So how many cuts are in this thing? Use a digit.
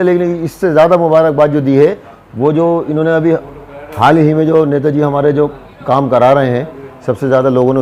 0